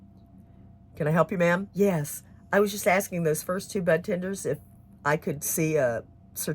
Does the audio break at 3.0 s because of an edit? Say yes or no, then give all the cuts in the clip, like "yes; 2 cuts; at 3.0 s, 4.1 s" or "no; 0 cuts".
no; 1 cut; at 1.7 s